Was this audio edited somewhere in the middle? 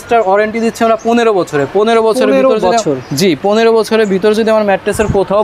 no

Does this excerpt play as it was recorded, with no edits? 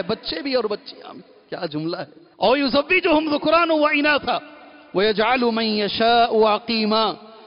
no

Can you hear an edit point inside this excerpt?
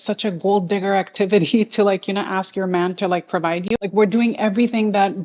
yes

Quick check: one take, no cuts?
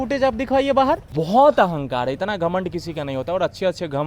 no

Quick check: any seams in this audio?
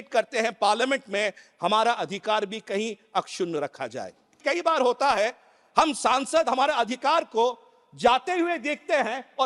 yes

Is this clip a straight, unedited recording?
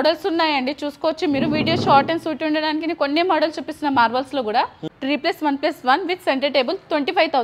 no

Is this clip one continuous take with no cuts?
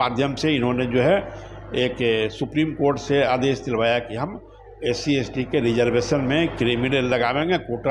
yes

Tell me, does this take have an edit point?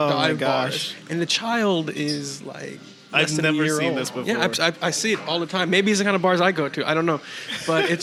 no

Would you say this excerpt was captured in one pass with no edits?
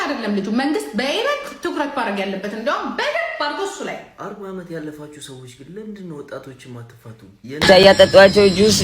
no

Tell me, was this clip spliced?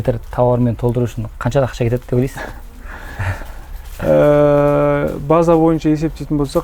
no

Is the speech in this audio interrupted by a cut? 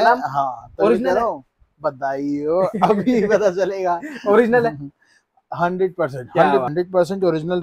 yes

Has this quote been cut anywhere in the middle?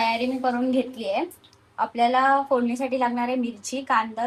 no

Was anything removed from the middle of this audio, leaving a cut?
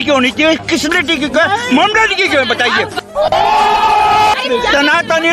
yes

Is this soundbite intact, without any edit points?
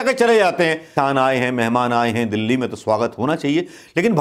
no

